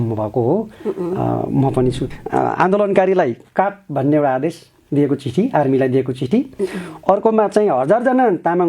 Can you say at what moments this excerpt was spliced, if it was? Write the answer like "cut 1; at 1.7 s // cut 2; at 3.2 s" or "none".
cut 1; at 2.0 s